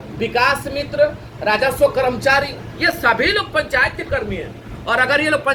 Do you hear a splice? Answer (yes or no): no